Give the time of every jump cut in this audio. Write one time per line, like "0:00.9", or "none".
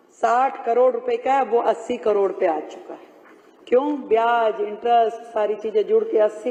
none